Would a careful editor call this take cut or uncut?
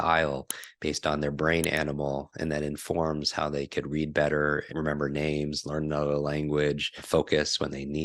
cut